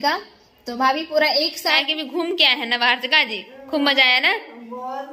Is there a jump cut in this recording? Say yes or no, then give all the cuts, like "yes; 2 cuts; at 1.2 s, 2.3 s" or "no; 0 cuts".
yes; 1 cut; at 1.8 s